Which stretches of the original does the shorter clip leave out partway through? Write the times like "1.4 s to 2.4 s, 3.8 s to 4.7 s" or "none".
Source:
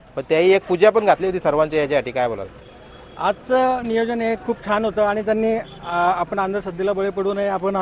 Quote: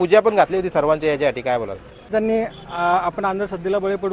2.8 s to 5.2 s